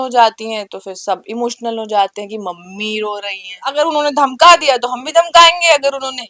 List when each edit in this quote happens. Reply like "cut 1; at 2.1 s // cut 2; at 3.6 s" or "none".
cut 1; at 3.6 s